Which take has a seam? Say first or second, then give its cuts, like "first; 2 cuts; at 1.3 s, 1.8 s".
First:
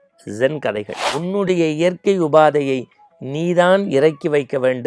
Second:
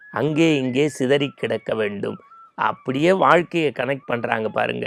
first; 1 cut; at 1.0 s